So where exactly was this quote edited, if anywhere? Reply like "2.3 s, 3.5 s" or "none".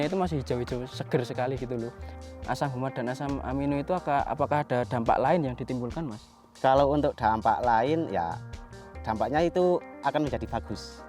2.1 s